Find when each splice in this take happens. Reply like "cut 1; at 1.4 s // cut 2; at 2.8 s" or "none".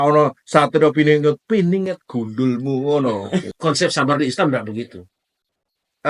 cut 1; at 3.5 s